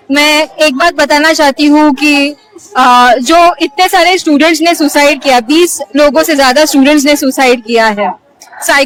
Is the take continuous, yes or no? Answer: yes